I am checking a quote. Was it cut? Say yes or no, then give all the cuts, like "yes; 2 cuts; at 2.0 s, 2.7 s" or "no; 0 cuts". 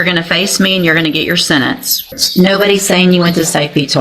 yes; 1 cut; at 2.2 s